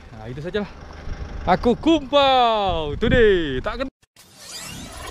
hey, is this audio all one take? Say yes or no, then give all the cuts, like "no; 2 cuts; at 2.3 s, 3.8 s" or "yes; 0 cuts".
no; 1 cut; at 4.0 s